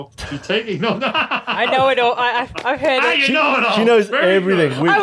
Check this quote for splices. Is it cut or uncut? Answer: uncut